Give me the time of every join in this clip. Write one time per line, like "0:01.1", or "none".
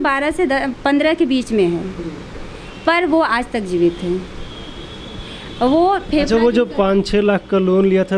none